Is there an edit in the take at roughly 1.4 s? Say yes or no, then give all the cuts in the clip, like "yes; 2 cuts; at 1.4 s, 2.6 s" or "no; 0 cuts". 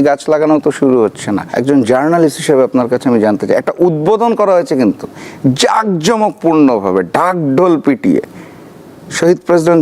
yes; 1 cut; at 1.4 s